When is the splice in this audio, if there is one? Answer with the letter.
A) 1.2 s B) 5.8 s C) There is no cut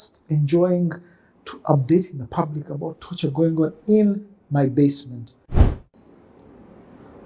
B